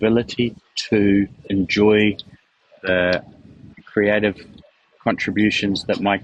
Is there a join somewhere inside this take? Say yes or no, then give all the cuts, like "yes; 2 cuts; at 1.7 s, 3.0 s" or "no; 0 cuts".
no; 0 cuts